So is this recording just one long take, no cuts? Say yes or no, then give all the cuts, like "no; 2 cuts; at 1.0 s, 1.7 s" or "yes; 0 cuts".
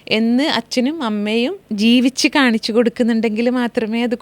no; 1 cut; at 1.6 s